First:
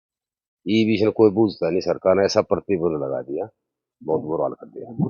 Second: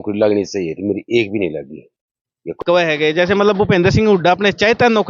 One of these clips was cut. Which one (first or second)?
second